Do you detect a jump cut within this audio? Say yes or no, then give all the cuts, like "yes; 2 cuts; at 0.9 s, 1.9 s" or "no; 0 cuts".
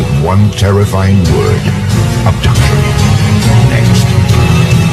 no; 0 cuts